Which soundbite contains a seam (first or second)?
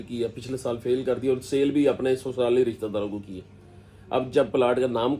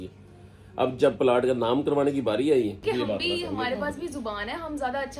second